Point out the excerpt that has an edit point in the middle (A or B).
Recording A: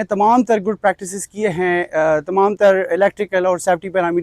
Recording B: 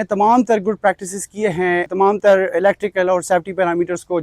B